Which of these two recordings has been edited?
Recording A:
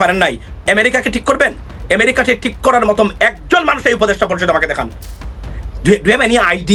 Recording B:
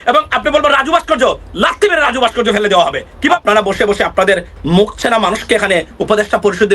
B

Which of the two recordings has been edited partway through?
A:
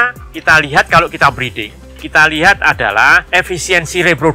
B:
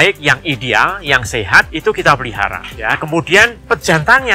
A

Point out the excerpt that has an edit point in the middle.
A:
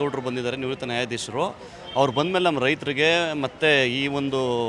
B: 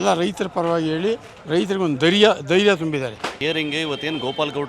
B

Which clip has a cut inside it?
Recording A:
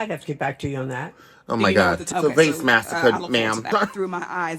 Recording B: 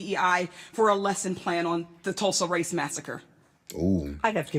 A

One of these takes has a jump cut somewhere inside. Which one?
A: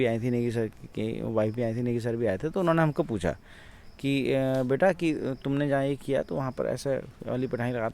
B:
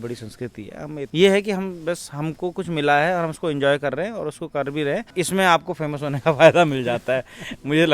B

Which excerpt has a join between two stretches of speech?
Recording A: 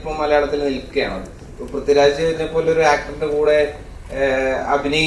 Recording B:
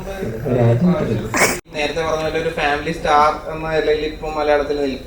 B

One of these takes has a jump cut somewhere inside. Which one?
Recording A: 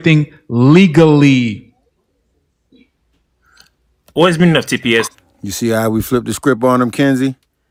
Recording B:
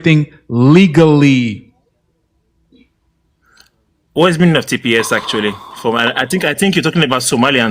B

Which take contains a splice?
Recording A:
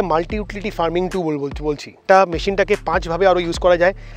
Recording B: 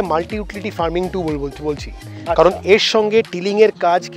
A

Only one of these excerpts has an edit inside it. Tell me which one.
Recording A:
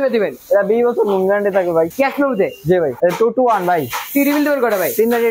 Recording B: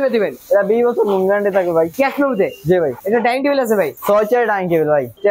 A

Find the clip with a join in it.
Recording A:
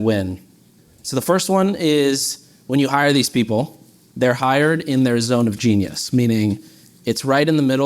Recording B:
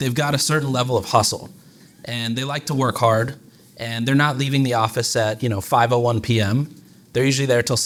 A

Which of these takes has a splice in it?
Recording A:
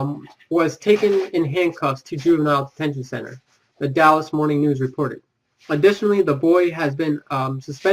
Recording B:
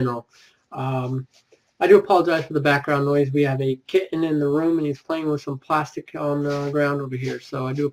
A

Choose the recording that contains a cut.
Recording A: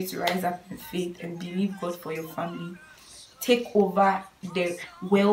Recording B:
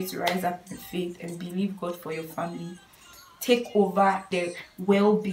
B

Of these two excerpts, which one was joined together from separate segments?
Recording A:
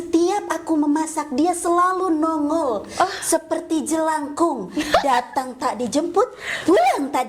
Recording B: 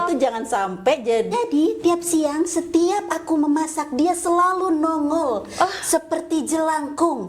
B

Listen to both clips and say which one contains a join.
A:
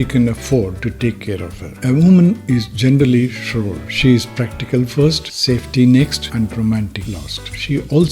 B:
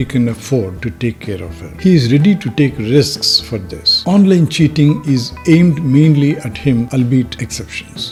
A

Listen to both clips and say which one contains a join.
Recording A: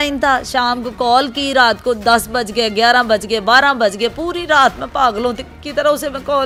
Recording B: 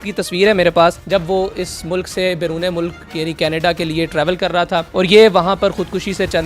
B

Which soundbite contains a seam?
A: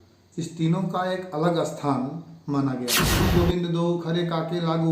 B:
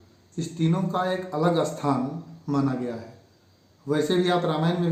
A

